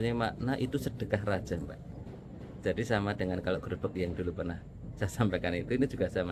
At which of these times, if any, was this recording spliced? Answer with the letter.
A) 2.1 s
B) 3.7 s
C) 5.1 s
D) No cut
D